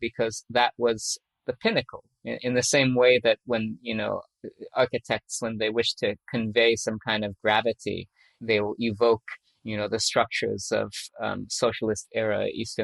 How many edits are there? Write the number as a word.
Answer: four